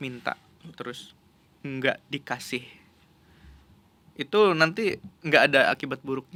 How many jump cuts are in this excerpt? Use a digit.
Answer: 0